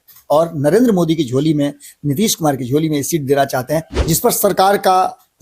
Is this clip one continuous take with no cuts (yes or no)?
no